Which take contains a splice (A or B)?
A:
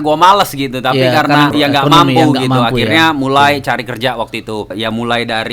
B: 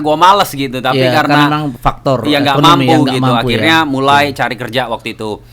A